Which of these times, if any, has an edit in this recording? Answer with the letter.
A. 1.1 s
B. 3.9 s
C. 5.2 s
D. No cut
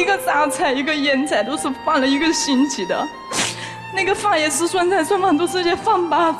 D